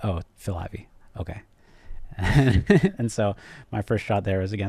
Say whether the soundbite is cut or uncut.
uncut